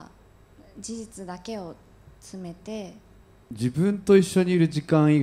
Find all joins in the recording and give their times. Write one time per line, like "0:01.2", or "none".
0:03.4

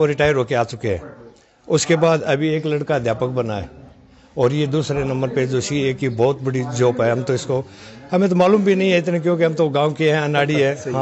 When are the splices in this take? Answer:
none

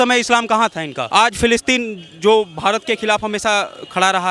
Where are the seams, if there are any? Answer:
0:00.9

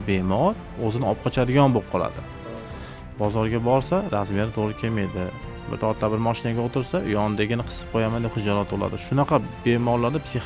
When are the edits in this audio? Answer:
none

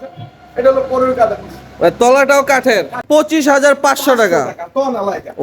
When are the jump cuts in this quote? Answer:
0:03.0

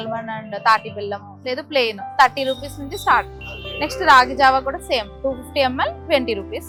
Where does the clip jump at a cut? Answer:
none

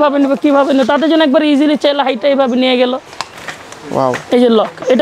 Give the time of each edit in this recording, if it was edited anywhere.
0:03.1

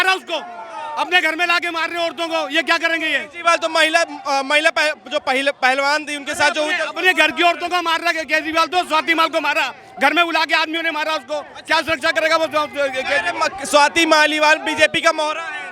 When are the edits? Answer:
none

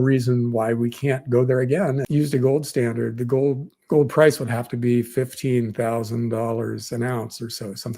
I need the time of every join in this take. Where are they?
0:02.0

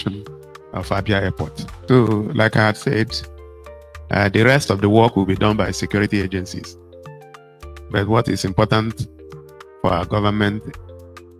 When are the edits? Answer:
0:01.7

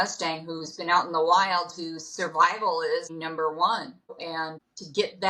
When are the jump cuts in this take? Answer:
0:03.1
0:04.2

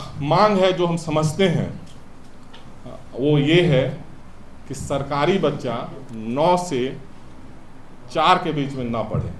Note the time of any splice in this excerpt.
none

